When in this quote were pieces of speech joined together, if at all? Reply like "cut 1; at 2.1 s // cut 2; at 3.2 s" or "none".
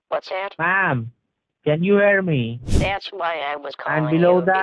cut 1; at 2.6 s